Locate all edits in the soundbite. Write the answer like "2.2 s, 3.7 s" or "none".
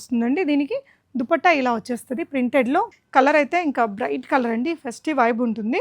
3.0 s

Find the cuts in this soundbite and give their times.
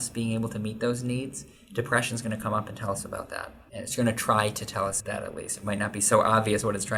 none

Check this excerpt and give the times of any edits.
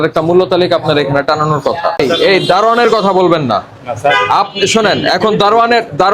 2.0 s

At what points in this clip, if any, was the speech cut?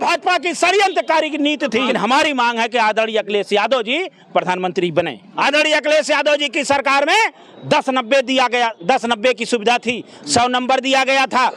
1.9 s, 5.3 s

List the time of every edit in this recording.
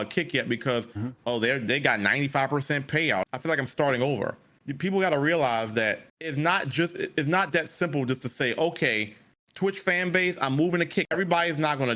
3.3 s, 6.1 s, 11.1 s

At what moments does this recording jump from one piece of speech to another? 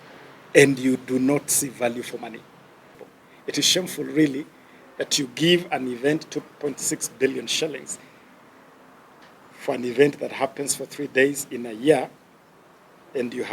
3.0 s

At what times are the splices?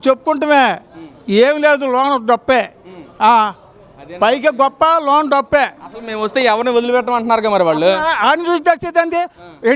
none

